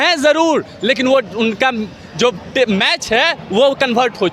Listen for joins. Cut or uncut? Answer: uncut